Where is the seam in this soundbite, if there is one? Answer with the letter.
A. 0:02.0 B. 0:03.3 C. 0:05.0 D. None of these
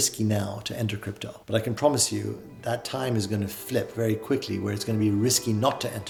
D